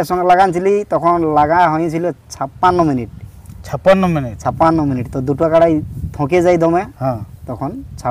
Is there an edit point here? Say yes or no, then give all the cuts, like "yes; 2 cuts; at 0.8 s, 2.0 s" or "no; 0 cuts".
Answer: no; 0 cuts